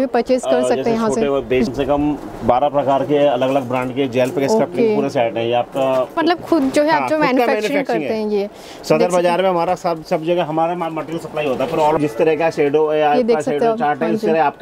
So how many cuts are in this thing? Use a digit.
3